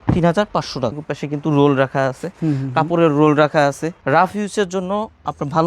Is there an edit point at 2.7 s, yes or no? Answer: no